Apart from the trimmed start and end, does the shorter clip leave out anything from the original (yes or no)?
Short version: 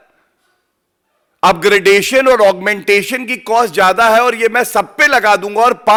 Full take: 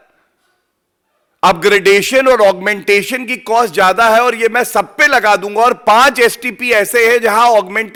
no